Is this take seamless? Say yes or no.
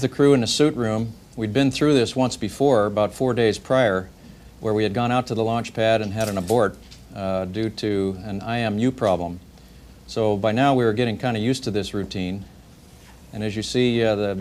yes